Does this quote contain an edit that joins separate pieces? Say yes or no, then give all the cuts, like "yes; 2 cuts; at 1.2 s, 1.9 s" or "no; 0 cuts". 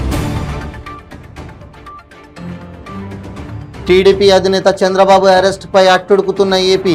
no; 0 cuts